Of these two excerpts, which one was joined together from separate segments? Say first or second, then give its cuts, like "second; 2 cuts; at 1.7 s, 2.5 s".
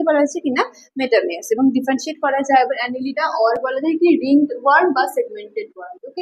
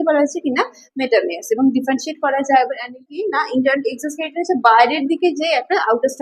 second; 1 cut; at 3.1 s